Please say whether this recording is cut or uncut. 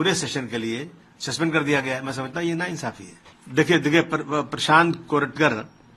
uncut